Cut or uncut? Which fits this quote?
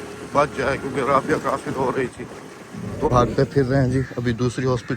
cut